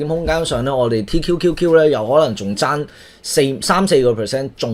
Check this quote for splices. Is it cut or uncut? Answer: uncut